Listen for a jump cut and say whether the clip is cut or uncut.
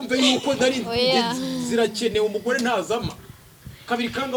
uncut